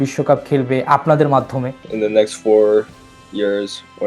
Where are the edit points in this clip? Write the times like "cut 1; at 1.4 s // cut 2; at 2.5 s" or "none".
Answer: cut 1; at 1.8 s